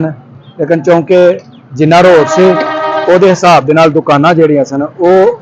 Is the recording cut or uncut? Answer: uncut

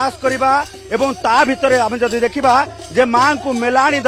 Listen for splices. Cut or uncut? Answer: uncut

